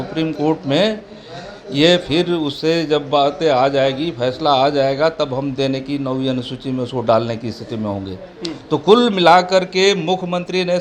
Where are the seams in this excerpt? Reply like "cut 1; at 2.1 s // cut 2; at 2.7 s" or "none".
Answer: none